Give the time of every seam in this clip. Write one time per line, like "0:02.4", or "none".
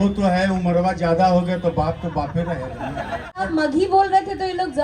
0:03.5